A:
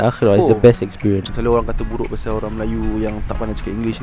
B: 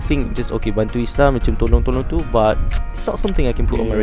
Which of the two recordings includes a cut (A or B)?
A